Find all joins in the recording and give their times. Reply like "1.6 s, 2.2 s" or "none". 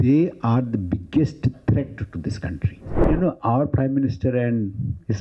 3.1 s